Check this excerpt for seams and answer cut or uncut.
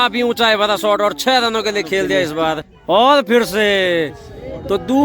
cut